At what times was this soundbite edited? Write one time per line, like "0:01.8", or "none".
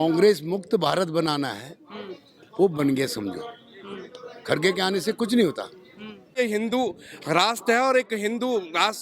0:06.3

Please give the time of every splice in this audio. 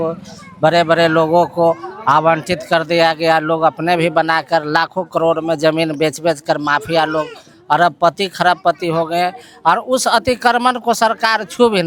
none

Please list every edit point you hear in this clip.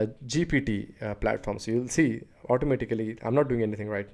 none

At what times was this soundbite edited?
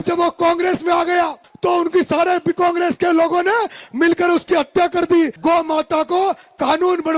0:05.4

